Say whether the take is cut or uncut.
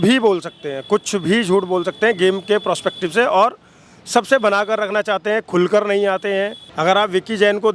cut